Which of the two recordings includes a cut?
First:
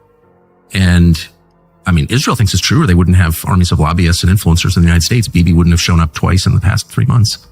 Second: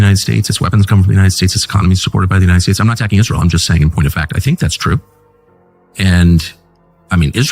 second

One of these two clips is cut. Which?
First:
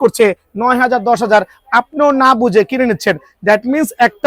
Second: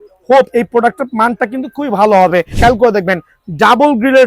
second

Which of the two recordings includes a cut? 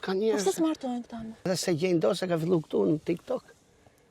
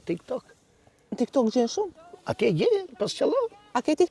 first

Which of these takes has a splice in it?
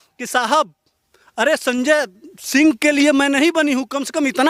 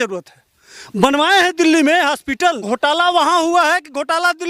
second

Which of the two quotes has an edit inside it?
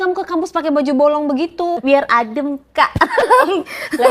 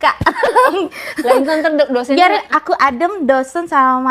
first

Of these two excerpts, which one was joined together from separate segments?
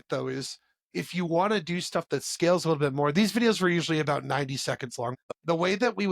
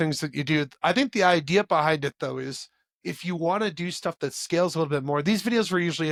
first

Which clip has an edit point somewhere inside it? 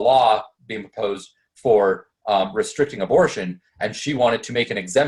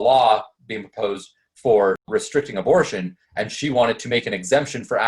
second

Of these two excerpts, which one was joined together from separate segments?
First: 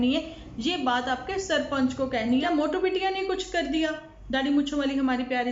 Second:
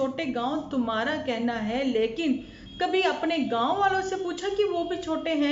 first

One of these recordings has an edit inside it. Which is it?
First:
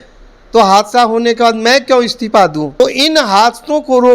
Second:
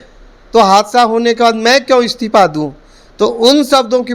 first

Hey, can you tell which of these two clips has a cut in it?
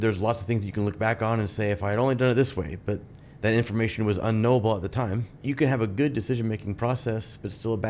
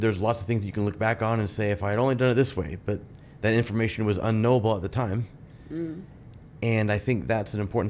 first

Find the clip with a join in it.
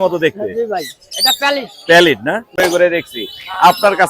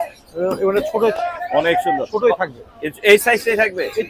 first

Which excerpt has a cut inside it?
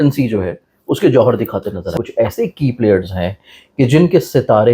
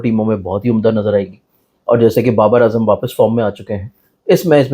first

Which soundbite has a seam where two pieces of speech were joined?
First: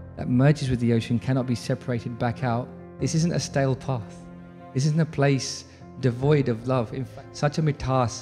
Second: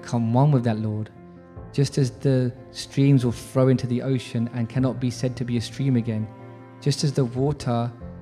first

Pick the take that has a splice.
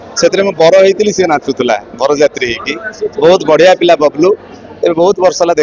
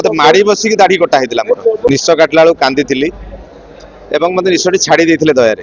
second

